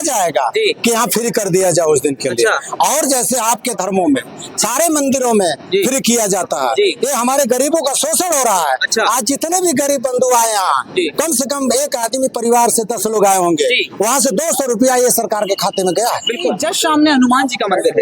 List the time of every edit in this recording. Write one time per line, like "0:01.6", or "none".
0:16.6